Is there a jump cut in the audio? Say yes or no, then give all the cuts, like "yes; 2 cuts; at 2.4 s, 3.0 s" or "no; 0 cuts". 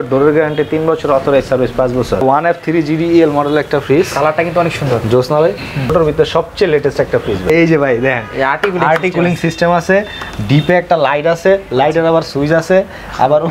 yes; 3 cuts; at 2.2 s, 5.9 s, 7.5 s